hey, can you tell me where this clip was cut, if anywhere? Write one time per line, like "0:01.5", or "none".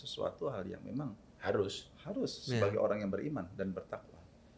none